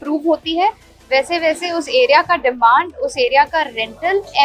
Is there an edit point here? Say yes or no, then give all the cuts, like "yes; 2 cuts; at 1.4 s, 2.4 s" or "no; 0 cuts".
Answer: no; 0 cuts